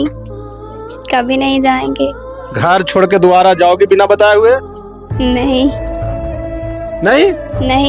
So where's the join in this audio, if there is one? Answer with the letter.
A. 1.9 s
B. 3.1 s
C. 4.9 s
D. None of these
D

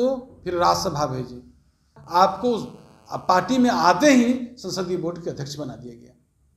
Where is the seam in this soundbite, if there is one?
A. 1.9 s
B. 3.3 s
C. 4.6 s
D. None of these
A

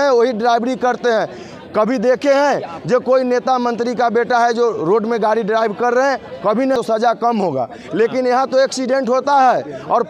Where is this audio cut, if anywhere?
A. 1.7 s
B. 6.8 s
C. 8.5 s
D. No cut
B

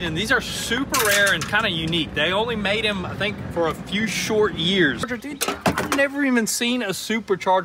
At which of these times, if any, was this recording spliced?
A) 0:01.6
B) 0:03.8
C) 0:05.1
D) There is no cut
C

